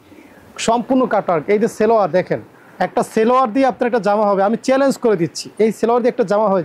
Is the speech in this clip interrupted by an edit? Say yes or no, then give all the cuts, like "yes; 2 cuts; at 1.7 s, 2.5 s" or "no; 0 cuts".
no; 0 cuts